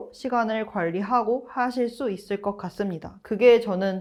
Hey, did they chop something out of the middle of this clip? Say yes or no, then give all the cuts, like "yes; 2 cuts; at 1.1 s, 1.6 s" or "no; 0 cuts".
no; 0 cuts